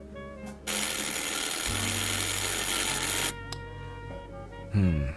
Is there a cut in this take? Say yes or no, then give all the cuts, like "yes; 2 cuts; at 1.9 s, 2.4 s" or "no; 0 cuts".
no; 0 cuts